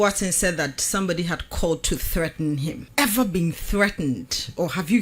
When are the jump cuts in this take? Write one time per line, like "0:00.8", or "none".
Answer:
0:02.8